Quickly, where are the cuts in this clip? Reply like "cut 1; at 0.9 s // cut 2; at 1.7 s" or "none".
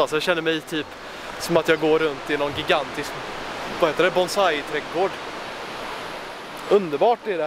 cut 1; at 6.6 s